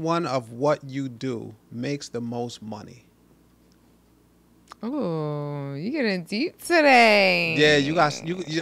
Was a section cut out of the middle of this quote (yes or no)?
no